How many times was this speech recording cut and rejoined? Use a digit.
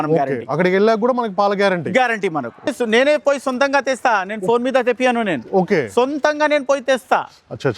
1